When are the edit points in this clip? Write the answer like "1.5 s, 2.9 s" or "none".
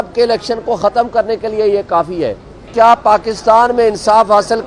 2.7 s